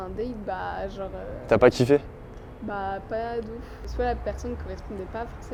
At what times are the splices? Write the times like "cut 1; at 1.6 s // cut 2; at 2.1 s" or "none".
none